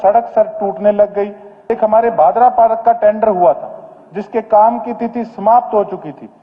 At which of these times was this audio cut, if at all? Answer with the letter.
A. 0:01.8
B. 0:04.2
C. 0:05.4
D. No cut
A